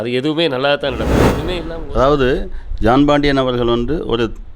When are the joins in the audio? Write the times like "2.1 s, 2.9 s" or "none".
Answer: 1.2 s